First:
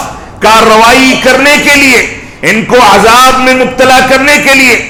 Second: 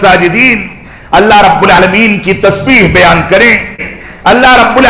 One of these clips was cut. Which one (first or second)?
second